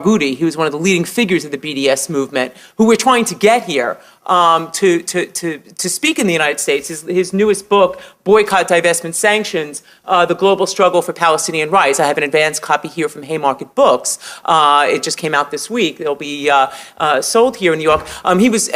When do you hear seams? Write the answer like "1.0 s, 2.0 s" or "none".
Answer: 16.3 s